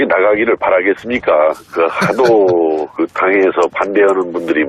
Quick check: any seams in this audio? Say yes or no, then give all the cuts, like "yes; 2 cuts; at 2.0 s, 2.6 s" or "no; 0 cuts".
yes; 1 cut; at 3.5 s